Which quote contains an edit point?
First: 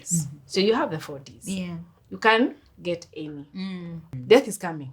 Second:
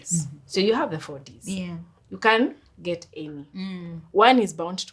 first; 1 cut; at 4.0 s

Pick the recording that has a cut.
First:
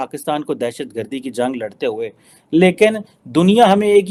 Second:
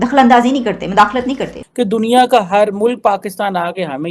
second; 1 cut; at 1.6 s

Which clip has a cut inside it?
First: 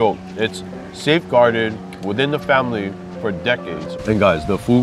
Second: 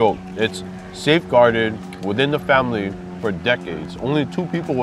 first; 1 cut; at 3.9 s

